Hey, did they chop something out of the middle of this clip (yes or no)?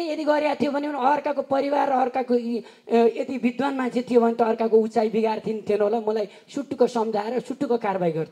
no